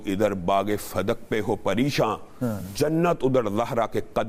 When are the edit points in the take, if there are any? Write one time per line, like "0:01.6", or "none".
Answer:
none